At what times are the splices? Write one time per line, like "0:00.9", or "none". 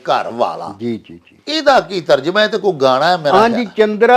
none